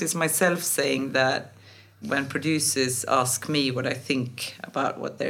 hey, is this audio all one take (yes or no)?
no